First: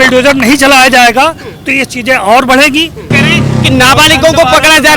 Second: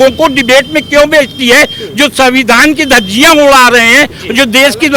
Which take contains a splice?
first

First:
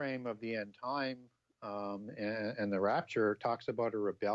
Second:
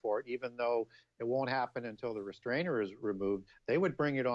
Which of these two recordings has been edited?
first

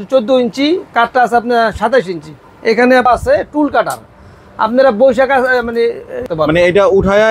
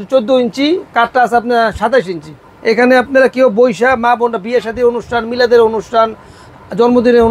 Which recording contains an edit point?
first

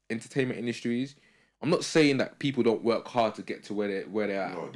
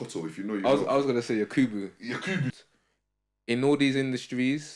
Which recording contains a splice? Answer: second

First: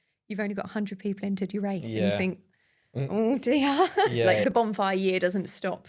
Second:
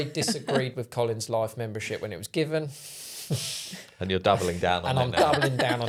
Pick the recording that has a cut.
first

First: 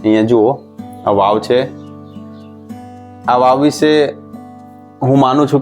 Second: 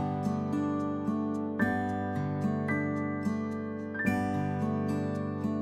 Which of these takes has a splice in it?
first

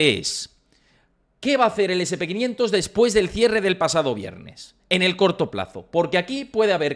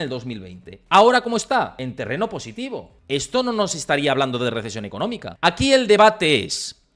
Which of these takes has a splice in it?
second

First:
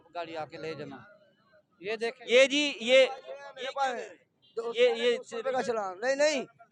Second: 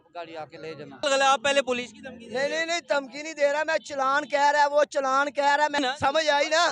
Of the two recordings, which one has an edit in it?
second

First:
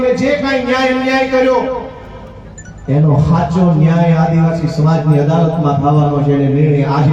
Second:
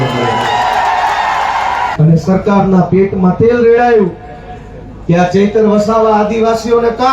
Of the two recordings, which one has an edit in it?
second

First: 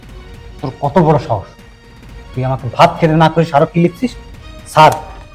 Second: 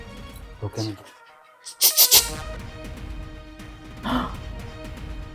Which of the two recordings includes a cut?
second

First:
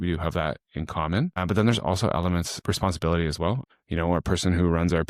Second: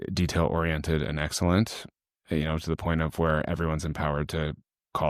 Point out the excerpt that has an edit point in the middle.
first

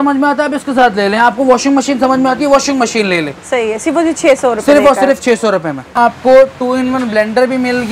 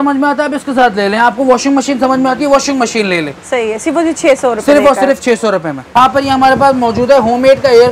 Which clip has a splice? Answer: first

